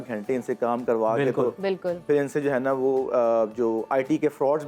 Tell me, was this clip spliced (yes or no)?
no